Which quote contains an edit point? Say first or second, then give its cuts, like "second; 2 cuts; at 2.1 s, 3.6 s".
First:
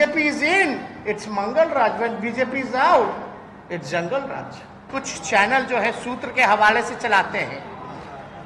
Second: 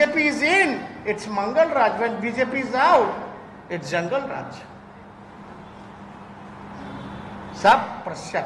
first; 1 cut; at 4.8 s